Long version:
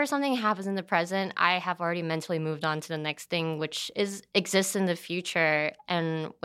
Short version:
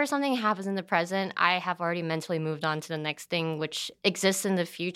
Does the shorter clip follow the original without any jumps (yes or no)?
no